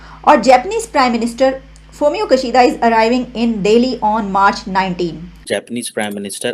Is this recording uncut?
no; 1 cut; at 5.3 s

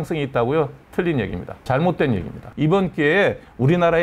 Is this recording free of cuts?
no; 2 cuts; at 1.5 s, 2.4 s

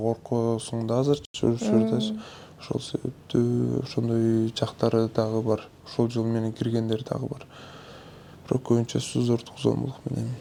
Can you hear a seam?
no; 0 cuts

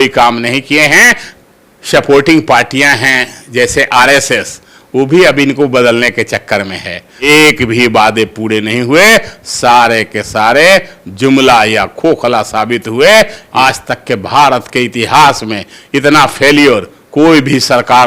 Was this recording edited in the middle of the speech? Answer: yes; 3 cuts; at 1.3 s, 7.1 s, 13.4 s

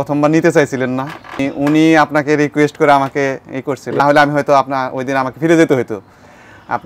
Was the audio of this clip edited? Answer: yes; 2 cuts; at 1.4 s, 4.0 s

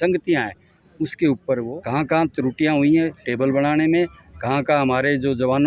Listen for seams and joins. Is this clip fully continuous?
no; 1 cut; at 1.7 s

